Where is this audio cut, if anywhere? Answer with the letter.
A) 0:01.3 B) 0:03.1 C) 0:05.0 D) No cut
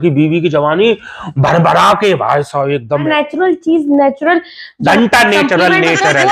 B